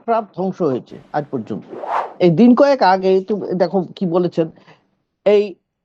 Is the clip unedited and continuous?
no; 1 cut; at 2.1 s

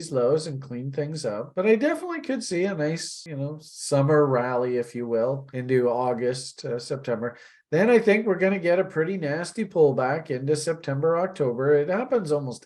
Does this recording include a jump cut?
yes; 2 cuts; at 3.2 s, 5.5 s

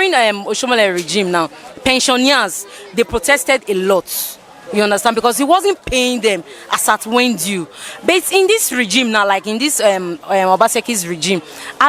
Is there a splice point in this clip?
no; 0 cuts

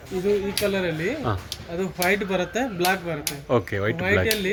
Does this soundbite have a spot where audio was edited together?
no; 0 cuts

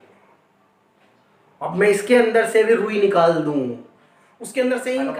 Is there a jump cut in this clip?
no; 0 cuts

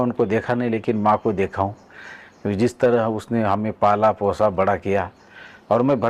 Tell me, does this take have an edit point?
no; 0 cuts

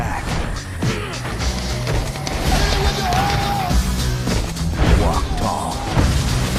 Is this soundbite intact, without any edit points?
yes; 0 cuts

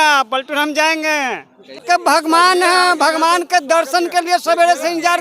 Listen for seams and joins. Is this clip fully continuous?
no; 1 cut; at 1.8 s

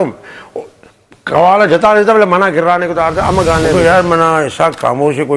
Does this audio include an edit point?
yes; 1 cut; at 3.7 s

